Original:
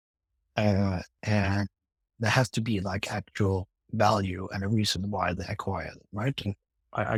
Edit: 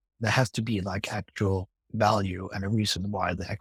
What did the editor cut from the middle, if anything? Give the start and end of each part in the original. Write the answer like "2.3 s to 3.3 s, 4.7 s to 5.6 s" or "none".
none